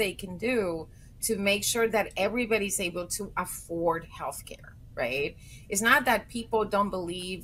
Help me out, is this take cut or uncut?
cut